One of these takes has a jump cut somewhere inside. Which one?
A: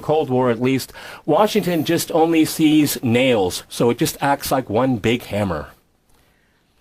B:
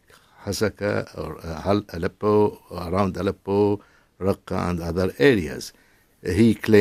A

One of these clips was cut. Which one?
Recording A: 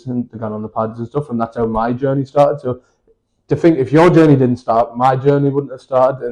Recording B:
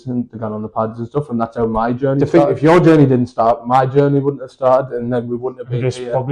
B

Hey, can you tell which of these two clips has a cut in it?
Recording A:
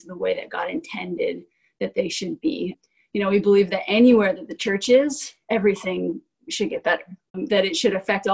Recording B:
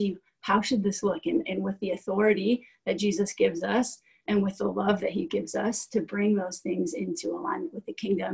A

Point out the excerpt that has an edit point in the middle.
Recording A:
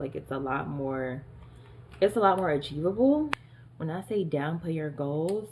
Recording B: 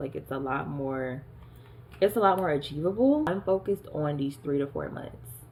A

